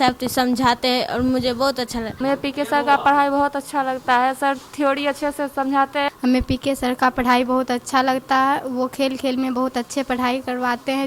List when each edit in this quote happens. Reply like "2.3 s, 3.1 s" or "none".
2.1 s, 6.1 s

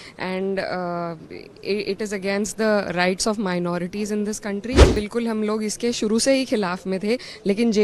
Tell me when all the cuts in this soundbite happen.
4.9 s

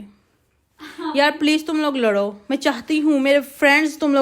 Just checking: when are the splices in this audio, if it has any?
2.6 s

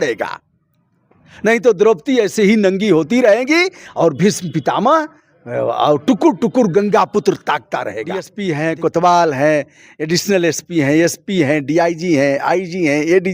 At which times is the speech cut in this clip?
8.3 s

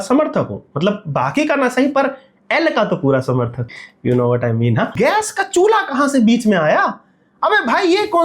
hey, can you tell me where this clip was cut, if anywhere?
3.7 s, 4.9 s

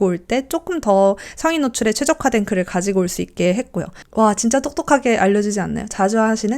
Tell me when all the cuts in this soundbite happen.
3.9 s

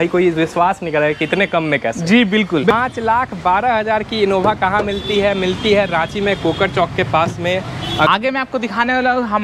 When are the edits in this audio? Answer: 2.7 s, 8.1 s

